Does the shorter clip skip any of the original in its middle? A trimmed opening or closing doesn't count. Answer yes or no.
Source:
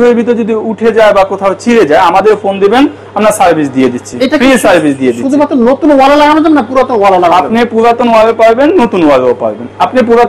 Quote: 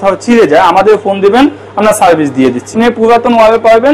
yes